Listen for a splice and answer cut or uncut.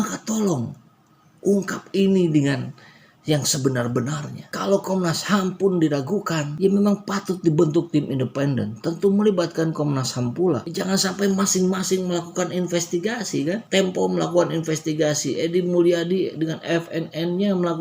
cut